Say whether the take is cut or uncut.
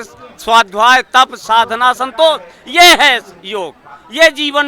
uncut